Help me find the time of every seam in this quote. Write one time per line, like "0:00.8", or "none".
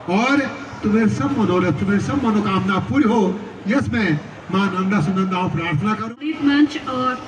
0:06.1